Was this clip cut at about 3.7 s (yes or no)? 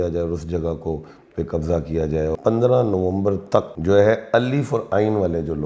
yes